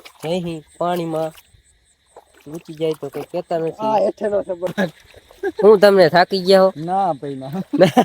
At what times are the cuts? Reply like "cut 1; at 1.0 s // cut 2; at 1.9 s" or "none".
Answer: cut 1; at 4.7 s